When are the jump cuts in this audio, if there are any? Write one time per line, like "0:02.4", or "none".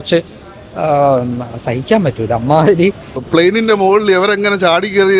0:03.2